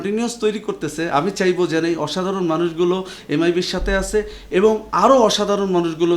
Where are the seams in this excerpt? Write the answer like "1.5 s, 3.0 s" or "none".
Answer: none